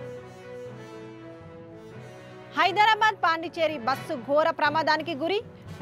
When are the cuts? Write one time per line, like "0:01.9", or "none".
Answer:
0:00.9

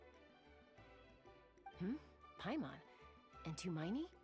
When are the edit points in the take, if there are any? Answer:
0:01.8

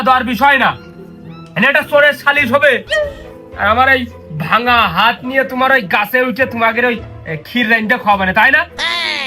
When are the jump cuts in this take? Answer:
none

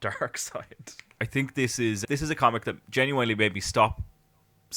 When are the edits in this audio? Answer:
0:01.2

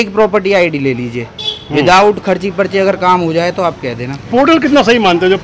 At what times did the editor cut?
none

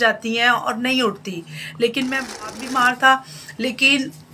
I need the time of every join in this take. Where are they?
0:02.5

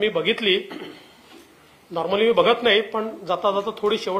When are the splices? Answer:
none

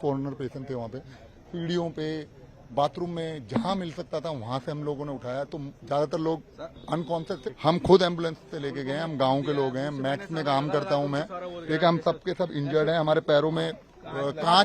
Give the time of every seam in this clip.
0:07.4

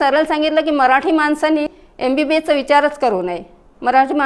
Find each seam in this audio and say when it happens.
0:01.8

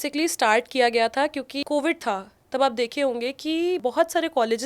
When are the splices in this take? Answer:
0:01.6

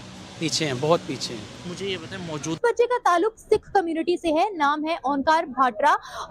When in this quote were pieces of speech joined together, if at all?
0:02.6

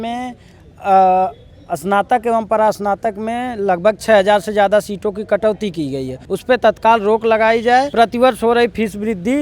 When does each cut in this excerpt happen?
0:06.2
0:07.9

